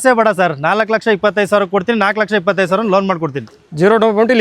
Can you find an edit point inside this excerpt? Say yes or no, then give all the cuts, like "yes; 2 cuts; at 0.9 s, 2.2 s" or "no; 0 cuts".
no; 0 cuts